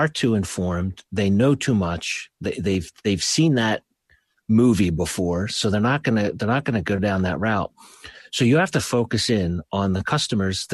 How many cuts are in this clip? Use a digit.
0